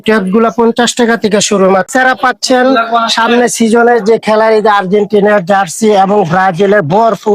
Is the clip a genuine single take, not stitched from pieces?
no; 1 cut; at 1.9 s

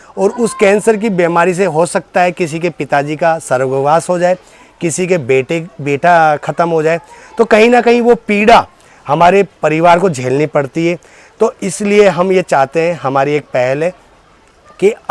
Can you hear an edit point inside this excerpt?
no; 0 cuts

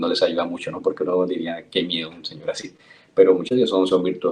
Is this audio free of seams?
no; 1 cut; at 3.1 s

